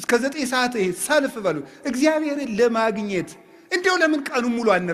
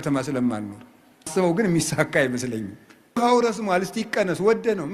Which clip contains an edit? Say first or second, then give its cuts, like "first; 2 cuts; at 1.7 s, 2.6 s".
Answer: second; 2 cuts; at 1.3 s, 3.2 s